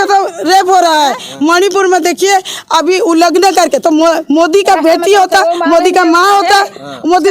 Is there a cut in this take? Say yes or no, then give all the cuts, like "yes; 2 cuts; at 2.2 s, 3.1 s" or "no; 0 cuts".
no; 0 cuts